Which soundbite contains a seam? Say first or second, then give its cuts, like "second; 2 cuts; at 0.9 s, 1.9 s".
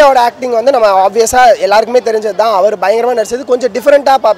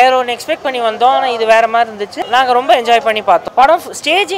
second; 2 cuts; at 2.2 s, 3.5 s